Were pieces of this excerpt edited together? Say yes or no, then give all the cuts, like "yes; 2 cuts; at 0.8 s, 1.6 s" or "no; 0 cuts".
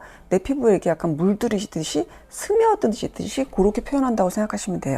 no; 0 cuts